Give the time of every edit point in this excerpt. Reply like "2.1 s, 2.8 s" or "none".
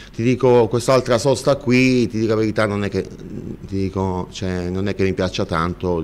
3.2 s

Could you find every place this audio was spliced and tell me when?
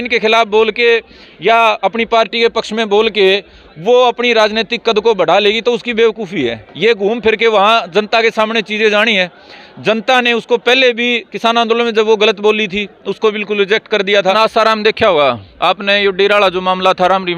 14.3 s

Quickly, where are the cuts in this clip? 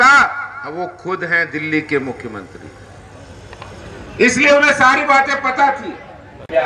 none

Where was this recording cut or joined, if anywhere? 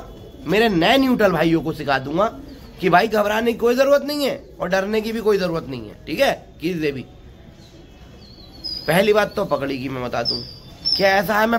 none

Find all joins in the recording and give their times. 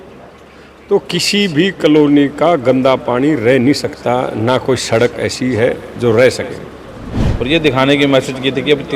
7.2 s

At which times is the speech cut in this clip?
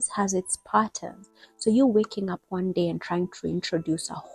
none

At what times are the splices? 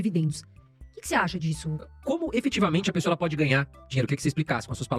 1.9 s

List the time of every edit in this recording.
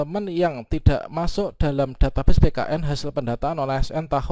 none

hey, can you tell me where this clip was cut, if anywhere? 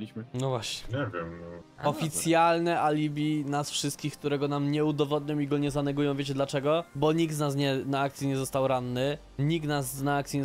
1.7 s

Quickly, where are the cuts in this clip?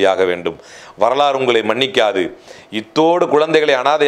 none

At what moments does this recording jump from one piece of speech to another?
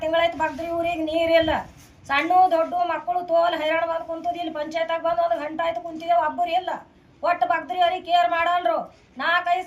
none

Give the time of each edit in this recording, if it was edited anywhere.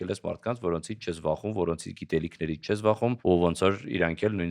3.2 s

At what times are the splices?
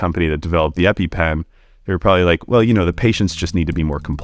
none

